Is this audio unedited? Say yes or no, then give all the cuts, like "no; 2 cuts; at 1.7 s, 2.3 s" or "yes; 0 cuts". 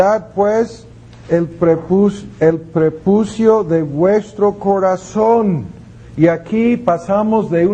no; 1 cut; at 6.6 s